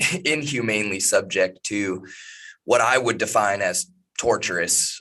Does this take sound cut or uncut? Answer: uncut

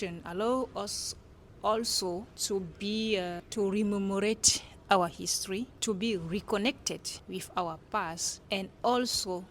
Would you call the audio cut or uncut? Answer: cut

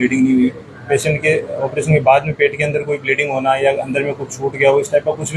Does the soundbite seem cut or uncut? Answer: uncut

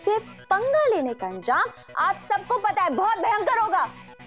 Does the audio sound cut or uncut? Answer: uncut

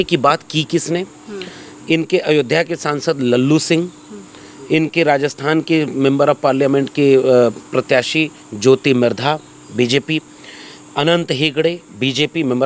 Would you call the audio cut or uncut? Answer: uncut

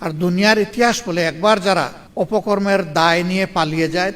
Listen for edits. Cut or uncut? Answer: cut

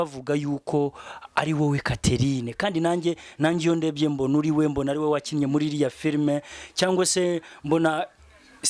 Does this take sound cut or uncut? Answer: uncut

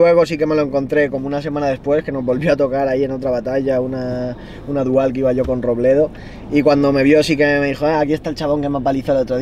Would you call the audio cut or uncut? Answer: uncut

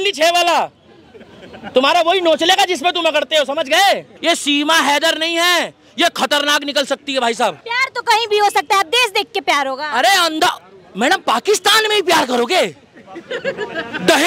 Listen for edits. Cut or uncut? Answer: cut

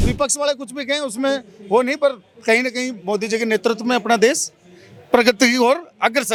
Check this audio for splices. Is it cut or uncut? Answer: uncut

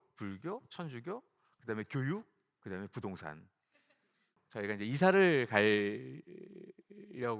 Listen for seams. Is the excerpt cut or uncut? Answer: cut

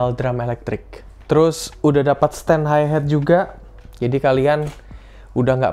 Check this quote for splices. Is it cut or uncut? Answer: uncut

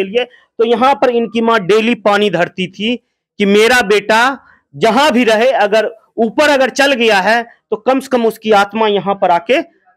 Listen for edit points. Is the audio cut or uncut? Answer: uncut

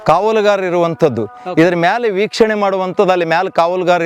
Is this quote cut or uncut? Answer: uncut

